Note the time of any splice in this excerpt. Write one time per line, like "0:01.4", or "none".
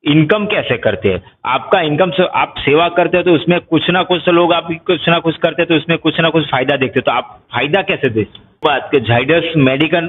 0:08.6